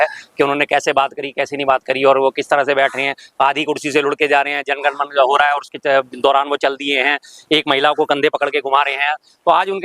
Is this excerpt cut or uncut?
uncut